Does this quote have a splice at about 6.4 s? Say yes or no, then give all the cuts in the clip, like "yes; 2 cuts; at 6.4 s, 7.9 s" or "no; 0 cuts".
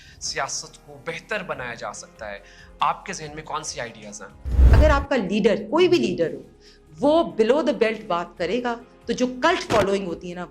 no; 1 cut; at 4.7 s